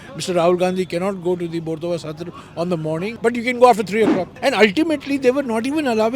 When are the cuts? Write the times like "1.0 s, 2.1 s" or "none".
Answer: 3.1 s, 4.3 s